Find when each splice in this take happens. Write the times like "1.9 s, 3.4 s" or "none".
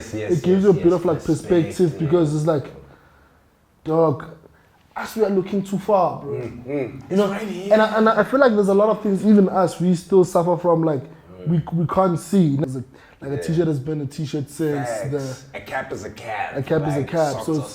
12.6 s